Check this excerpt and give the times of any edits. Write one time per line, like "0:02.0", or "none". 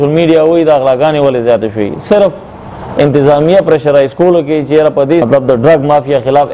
0:05.3